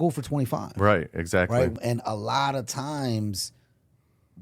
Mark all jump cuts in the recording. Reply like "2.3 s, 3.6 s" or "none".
1.8 s